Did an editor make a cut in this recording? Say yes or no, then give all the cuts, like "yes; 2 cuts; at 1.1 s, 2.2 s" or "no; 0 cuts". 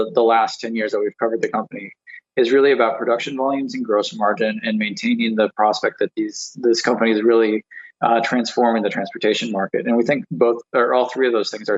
no; 0 cuts